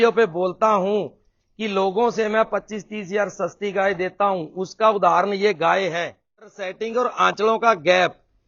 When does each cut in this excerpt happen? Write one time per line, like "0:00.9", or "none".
0:06.6

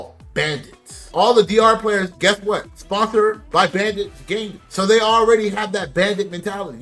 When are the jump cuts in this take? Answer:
0:04.6

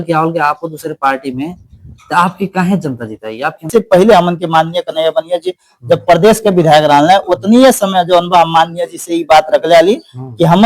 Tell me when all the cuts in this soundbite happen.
0:03.7

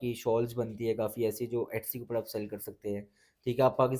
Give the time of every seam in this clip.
none

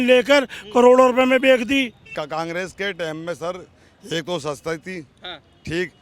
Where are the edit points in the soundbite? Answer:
0:02.0

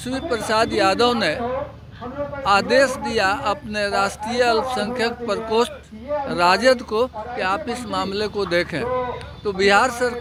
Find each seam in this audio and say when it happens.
none

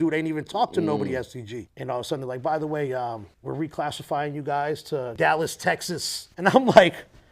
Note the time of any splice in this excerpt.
0:01.6
0:03.3
0:05.1

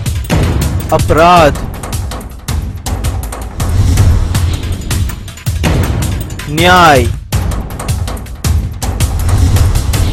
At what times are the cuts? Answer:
none

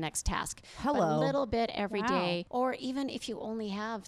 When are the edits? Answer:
0:02.5

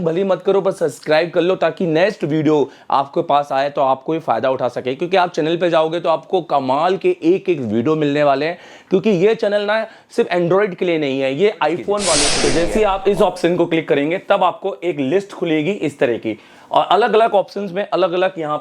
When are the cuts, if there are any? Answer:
0:12.3

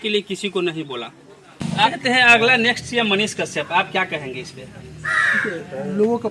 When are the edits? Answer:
0:01.8

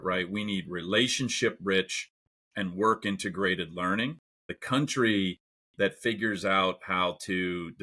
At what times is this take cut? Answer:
0:04.6

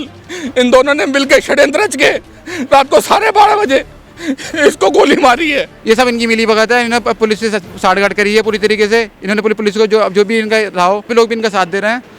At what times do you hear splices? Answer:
0:05.7
0:11.1

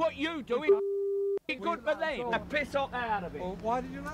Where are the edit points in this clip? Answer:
0:02.3

